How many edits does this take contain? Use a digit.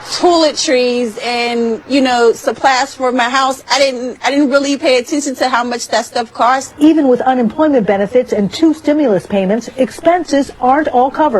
1